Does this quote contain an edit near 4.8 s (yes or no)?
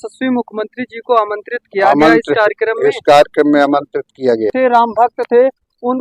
yes